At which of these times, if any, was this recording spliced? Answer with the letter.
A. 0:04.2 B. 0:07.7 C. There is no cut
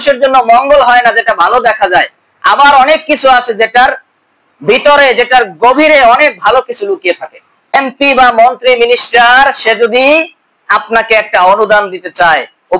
B